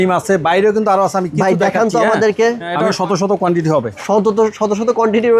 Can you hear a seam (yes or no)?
yes